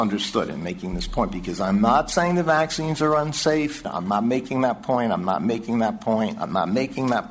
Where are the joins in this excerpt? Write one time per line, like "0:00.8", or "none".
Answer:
0:03.9